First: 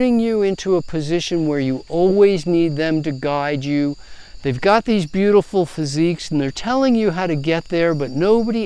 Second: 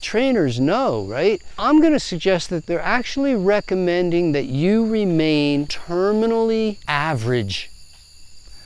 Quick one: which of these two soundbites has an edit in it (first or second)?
second